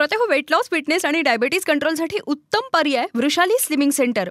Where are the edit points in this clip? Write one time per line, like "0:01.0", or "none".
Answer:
none